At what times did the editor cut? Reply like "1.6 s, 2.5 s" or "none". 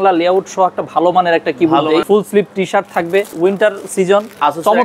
2.0 s, 3.3 s